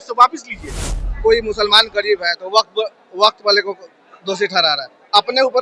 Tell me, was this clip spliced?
yes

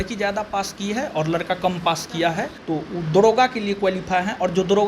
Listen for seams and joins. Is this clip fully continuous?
no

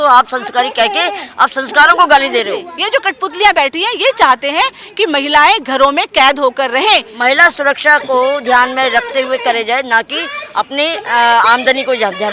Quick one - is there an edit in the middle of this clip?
yes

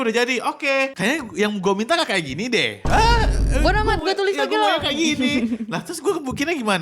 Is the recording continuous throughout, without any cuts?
no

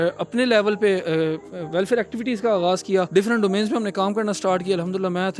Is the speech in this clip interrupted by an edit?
yes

